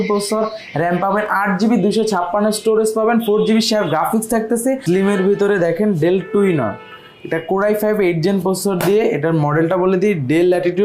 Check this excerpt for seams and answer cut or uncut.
cut